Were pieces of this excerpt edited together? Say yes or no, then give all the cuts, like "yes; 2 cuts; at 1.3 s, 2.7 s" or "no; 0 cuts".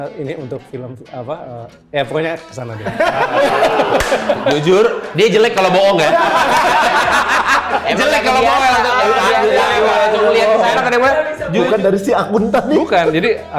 yes; 1 cut; at 11.6 s